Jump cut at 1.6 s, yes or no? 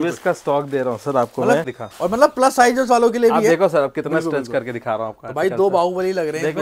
yes